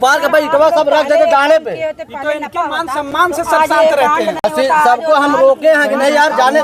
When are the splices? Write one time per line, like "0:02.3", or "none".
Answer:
none